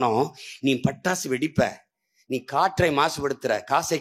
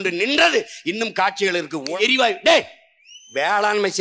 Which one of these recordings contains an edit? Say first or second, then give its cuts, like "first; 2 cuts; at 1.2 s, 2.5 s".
second; 1 cut; at 2.0 s